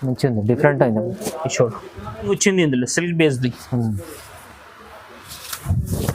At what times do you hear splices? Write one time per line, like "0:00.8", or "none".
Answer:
0:02.3

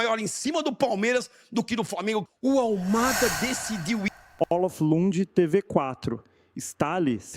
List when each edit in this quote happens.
0:04.2

